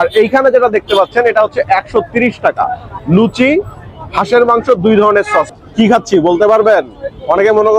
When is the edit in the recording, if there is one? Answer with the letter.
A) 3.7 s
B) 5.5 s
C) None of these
B